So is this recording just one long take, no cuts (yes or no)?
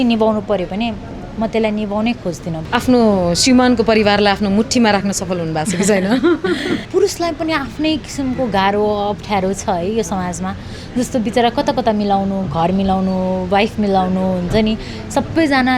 no